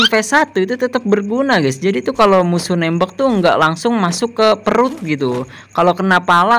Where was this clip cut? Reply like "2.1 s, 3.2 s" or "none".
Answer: none